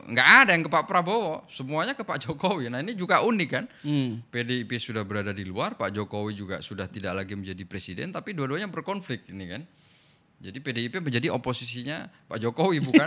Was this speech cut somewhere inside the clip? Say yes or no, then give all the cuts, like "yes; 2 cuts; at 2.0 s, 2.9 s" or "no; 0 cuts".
no; 0 cuts